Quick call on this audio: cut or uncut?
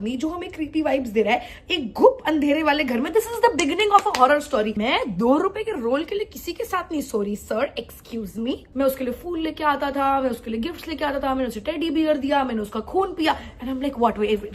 cut